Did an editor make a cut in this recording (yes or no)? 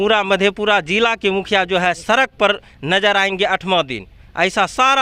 no